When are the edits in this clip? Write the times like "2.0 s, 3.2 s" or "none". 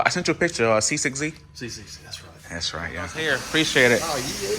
3.3 s